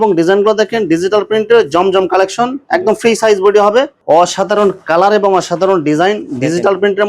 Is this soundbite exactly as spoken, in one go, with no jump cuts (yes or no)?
no